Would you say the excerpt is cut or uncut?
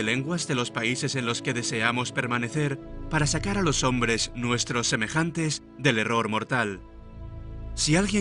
uncut